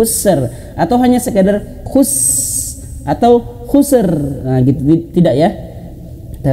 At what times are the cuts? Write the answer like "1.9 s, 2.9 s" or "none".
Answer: none